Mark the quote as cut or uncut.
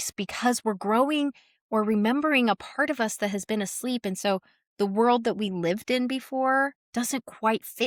uncut